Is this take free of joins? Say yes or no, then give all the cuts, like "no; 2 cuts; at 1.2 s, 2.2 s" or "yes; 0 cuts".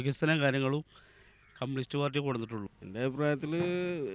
no; 1 cut; at 2.8 s